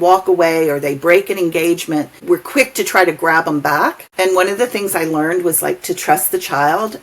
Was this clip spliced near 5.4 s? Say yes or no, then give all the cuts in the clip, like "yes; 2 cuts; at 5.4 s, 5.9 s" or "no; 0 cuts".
no; 2 cuts; at 2.1 s, 4.0 s